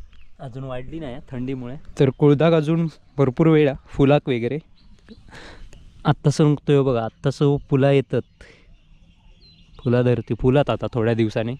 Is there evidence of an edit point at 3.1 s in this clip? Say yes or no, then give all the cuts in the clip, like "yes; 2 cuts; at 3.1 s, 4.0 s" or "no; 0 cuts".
no; 1 cut; at 1.8 s